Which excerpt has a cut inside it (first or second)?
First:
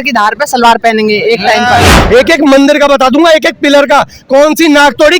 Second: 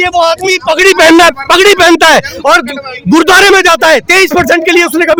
first